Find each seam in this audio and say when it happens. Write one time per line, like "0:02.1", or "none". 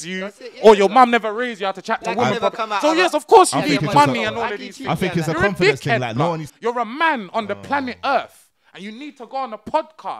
0:06.5